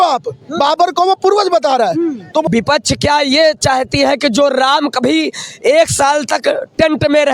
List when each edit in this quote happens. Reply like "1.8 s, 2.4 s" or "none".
2.4 s